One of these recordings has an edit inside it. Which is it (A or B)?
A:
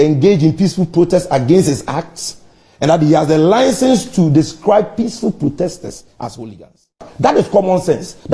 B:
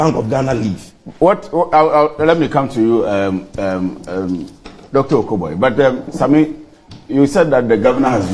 A